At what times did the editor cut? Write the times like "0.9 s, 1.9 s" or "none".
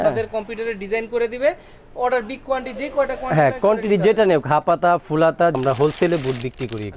5.6 s